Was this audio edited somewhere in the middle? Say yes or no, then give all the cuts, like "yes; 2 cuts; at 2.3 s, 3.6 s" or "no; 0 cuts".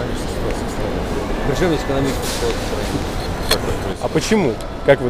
no; 0 cuts